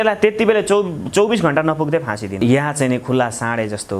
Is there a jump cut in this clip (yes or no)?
yes